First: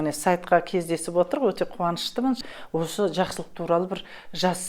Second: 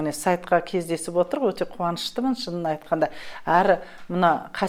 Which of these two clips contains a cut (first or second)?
first